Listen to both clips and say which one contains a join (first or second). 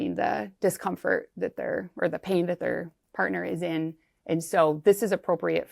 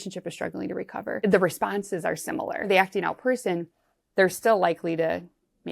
second